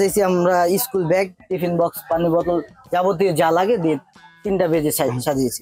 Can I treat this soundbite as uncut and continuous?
yes; 0 cuts

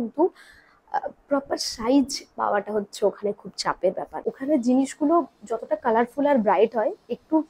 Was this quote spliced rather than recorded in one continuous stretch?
yes; 1 cut; at 4.2 s

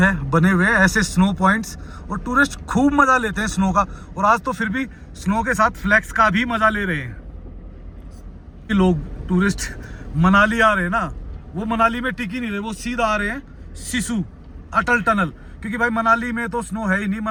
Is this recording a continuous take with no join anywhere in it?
yes; 0 cuts

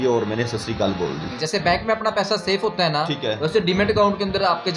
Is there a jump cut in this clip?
yes; 1 cut; at 1.3 s

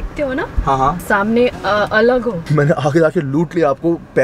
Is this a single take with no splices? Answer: no; 1 cut; at 2.5 s

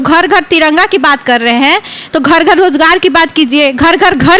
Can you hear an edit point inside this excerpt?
no; 0 cuts

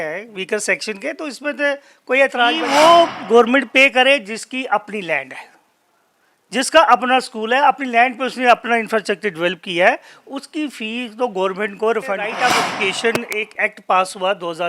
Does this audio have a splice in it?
yes; 2 cuts; at 2.6 s, 12.4 s

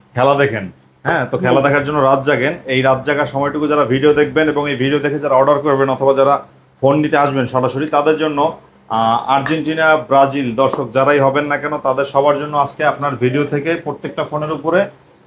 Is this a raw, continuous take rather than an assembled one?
yes; 0 cuts

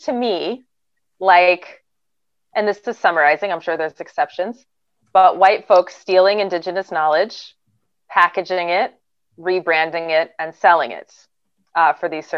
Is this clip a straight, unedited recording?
yes; 0 cuts

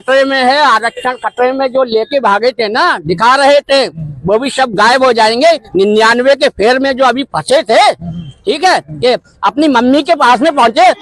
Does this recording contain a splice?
no; 0 cuts

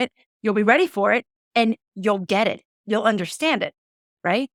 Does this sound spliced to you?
no; 0 cuts

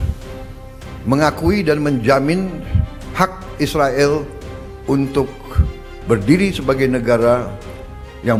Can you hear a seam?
no; 0 cuts

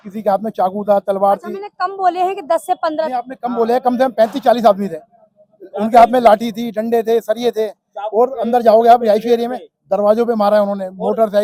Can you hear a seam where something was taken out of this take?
no; 0 cuts

